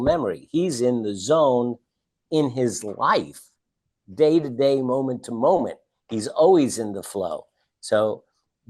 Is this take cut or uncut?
uncut